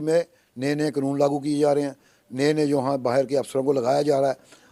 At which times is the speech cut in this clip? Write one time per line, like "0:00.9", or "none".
none